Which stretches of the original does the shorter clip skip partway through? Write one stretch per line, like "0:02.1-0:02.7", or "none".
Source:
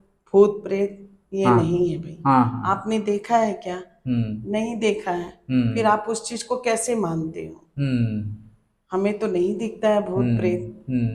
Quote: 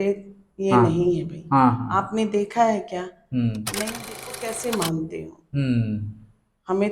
0:04.7-0:06.2